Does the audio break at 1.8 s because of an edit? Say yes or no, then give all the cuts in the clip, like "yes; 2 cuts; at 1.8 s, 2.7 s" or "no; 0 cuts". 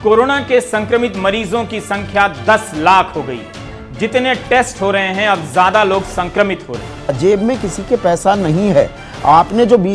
no; 2 cuts; at 3.8 s, 7.1 s